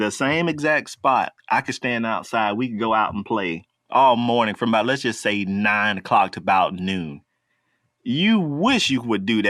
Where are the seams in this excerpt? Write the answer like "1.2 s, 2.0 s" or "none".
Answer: 1.3 s